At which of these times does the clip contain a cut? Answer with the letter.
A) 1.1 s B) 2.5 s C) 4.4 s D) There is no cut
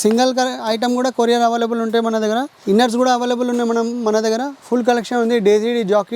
B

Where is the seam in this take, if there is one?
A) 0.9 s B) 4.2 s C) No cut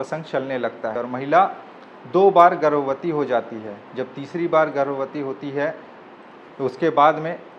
A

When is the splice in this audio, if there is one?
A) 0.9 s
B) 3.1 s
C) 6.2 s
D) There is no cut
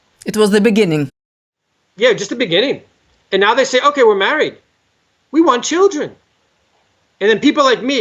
D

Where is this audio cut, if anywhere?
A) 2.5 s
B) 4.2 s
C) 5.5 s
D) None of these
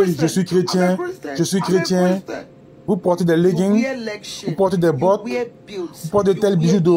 D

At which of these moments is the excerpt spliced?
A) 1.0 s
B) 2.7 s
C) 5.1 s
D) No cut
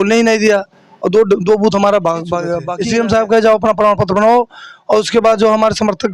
B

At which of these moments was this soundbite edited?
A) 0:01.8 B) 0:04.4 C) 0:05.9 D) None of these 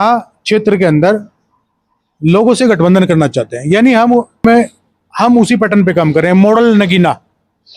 B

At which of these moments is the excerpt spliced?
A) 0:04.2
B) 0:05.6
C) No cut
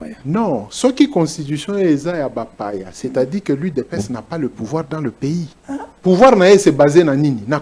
B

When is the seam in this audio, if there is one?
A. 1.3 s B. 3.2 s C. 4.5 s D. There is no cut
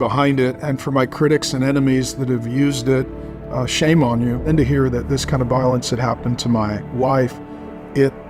C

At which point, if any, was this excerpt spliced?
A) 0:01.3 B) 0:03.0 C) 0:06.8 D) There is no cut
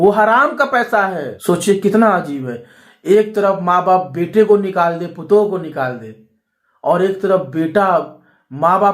A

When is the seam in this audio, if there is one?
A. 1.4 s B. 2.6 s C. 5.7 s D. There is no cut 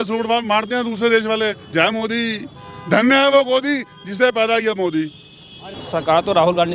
C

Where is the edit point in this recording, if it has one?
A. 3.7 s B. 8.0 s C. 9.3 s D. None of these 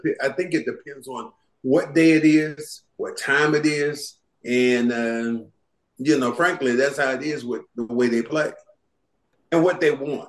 C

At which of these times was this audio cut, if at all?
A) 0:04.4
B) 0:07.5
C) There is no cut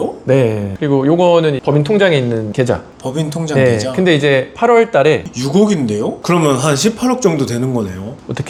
C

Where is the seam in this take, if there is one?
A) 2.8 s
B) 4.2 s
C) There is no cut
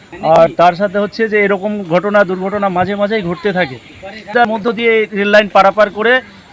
B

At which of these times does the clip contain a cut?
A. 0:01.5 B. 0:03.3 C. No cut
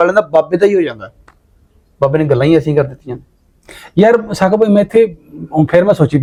C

